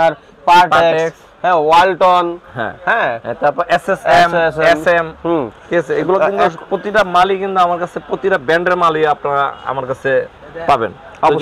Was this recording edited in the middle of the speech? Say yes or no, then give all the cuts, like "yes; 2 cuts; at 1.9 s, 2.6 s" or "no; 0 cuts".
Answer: no; 0 cuts